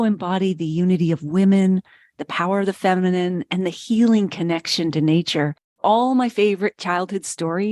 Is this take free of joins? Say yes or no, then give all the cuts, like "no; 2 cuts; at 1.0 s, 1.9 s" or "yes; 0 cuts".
no; 1 cut; at 5.8 s